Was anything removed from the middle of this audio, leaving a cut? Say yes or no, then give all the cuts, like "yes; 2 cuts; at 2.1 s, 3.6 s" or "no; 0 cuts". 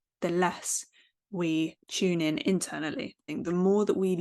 yes; 2 cuts; at 1.8 s, 3.2 s